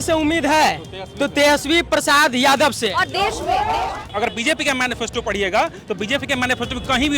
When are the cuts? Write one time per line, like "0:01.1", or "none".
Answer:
0:04.1